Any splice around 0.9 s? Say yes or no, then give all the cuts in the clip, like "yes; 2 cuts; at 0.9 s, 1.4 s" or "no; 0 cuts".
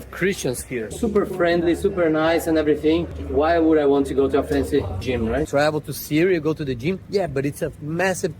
yes; 2 cuts; at 0.9 s, 5.5 s